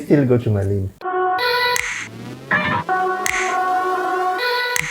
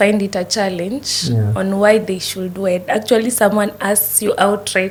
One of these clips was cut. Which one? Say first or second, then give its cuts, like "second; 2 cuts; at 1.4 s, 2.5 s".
first; 1 cut; at 1.1 s